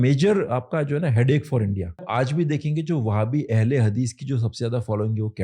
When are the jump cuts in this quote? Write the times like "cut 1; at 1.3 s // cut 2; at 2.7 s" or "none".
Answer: cut 1; at 2.0 s